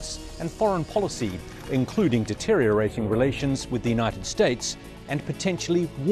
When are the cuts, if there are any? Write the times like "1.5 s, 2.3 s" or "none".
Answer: 2.4 s